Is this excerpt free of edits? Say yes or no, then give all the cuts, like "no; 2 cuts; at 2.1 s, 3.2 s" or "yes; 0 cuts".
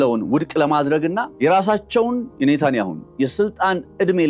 no; 1 cut; at 1.4 s